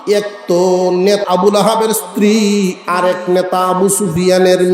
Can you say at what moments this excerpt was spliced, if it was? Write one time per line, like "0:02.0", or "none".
0:01.2